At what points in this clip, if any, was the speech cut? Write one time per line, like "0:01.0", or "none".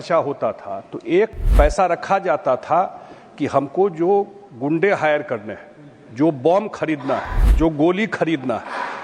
0:01.4
0:07.4

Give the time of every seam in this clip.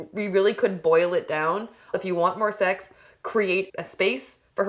0:02.0
0:03.8

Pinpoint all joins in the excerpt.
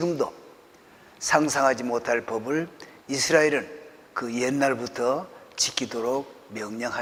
none

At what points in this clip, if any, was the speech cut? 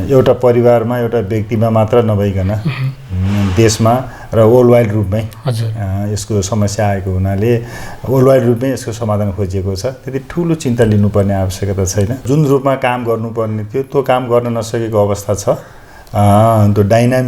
0:12.2

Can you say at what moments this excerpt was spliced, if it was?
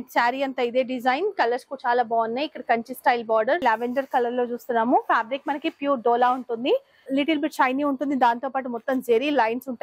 0:03.6
0:07.0

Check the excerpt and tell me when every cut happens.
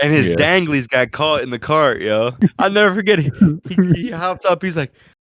0:02.3

